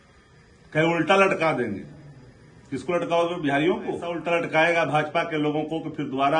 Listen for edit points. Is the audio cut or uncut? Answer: cut